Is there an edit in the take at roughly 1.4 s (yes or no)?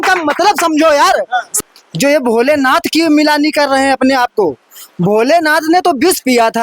yes